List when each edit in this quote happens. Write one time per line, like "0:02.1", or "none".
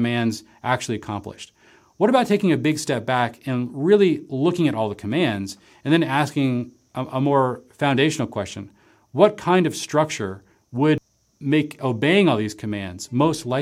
0:11.0